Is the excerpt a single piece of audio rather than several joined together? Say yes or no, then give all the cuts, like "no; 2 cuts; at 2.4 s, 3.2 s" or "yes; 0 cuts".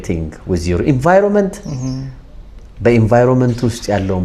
yes; 0 cuts